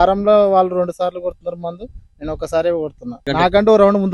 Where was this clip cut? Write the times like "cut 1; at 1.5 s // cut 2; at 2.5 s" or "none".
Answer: cut 1; at 3.2 s